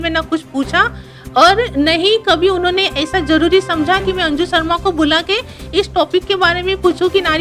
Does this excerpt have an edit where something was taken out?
no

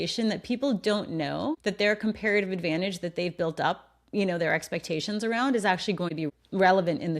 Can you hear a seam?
yes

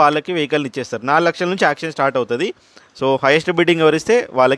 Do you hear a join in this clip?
no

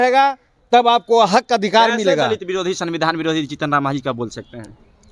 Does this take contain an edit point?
no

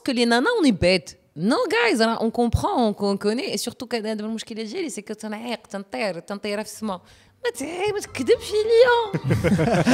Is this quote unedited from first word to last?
yes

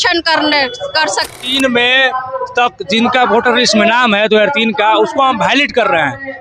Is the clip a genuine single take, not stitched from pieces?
no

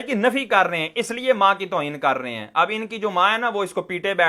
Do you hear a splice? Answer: no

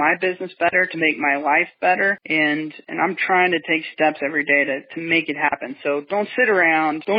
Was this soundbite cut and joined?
no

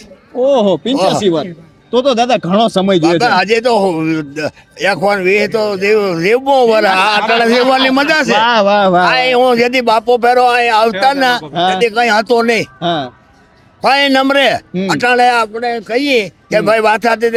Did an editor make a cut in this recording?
no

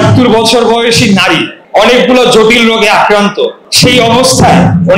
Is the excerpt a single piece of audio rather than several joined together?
no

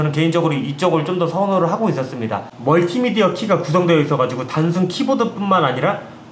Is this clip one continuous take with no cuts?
no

